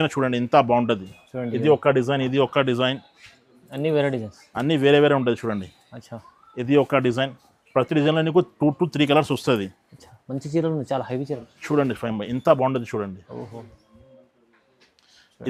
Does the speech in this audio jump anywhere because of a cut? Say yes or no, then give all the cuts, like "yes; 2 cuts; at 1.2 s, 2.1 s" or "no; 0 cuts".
no; 0 cuts